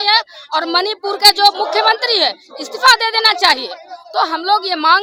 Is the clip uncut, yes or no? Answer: yes